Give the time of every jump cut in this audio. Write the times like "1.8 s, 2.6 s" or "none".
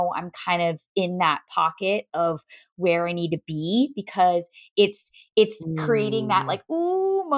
none